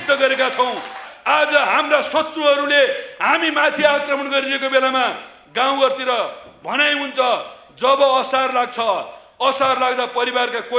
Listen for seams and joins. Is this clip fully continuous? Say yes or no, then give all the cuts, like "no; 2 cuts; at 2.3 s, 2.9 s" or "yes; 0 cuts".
no; 1 cut; at 1.1 s